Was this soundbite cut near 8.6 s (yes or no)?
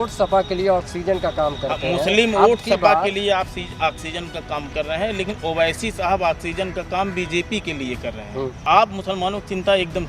yes